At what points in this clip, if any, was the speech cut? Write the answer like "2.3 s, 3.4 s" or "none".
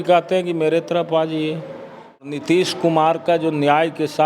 2.2 s